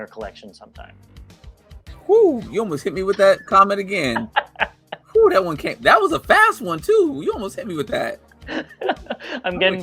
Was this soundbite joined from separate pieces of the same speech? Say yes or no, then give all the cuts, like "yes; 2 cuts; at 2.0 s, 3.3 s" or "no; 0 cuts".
no; 0 cuts